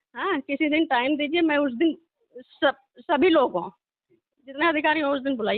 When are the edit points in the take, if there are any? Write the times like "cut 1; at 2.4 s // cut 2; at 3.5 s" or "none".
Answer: none